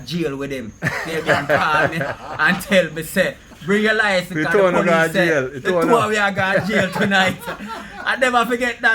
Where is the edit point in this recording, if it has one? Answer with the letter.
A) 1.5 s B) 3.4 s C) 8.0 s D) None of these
D